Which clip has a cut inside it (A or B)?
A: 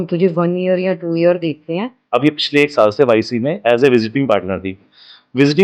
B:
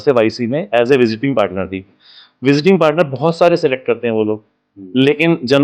A